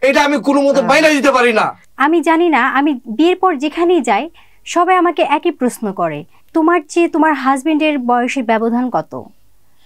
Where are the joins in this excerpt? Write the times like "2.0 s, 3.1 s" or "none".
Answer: 1.8 s